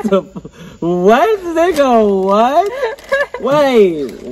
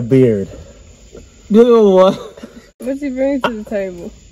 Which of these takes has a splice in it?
second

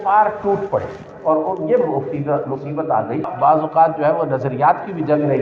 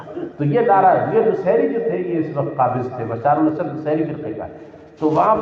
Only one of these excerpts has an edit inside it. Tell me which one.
first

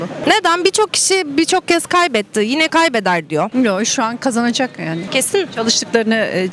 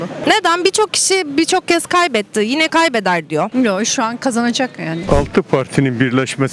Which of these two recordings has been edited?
second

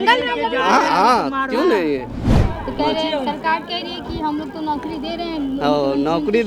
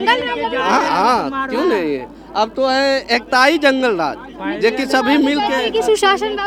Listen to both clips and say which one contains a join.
first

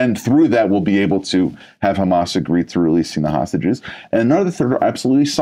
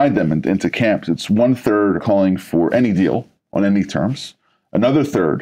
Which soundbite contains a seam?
second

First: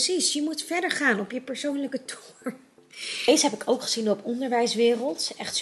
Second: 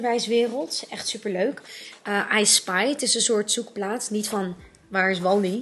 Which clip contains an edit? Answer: first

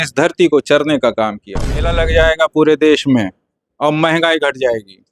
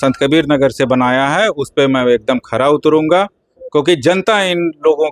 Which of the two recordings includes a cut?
first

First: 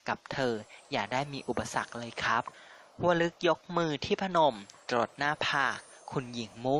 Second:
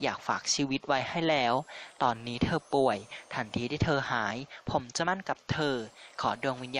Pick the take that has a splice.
first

